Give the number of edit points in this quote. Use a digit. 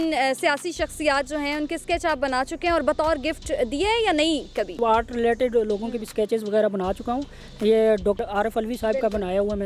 1